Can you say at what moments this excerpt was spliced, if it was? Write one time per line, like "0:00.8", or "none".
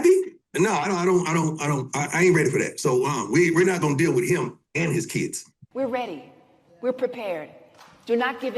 0:05.6